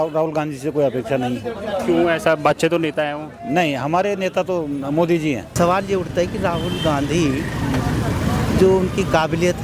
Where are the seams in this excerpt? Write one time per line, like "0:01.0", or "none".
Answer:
0:05.5